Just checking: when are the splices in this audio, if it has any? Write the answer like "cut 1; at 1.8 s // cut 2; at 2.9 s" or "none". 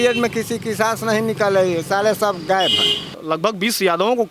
cut 1; at 3.1 s